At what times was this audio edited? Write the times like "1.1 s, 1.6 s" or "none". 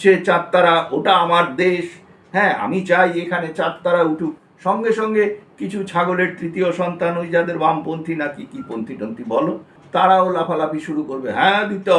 9.7 s